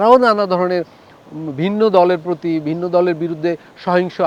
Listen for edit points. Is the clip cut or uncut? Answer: uncut